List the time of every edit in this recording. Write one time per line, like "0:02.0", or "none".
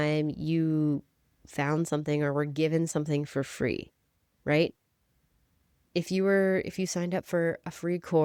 none